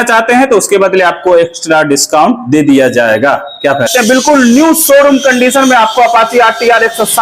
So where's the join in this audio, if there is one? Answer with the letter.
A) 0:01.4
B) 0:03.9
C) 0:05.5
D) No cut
B